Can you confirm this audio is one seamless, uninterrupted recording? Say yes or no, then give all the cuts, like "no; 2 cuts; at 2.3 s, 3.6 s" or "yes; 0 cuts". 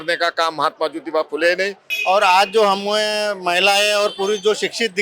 no; 1 cut; at 1.9 s